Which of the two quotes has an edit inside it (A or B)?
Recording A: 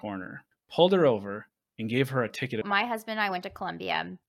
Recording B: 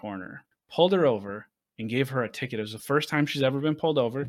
A